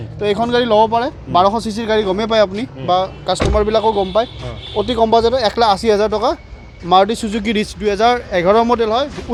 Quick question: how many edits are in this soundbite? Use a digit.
0